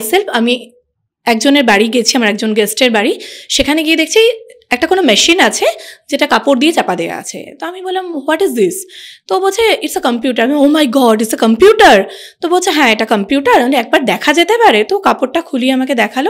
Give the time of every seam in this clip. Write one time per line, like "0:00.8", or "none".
none